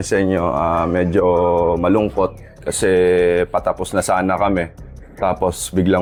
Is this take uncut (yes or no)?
yes